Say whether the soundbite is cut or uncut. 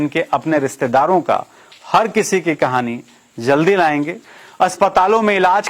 cut